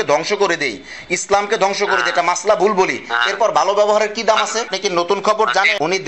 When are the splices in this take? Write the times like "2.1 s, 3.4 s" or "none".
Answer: 4.7 s